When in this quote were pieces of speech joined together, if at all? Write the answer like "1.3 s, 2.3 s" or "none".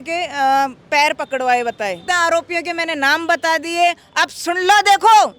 2.0 s